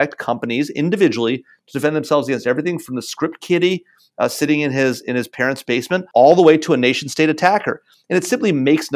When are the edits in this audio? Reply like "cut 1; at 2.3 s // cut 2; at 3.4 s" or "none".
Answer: cut 1; at 6.1 s